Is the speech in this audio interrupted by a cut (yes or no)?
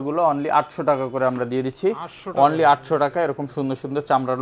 no